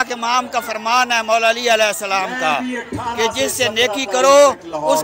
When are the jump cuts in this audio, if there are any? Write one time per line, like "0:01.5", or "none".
none